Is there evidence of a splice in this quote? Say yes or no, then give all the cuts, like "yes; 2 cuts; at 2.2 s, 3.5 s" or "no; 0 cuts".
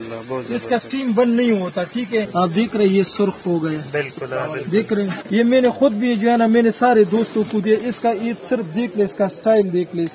yes; 2 cuts; at 2.3 s, 5.2 s